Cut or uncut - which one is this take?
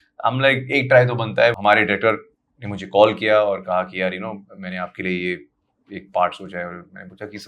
cut